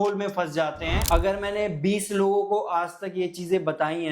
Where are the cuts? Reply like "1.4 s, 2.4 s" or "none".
1.0 s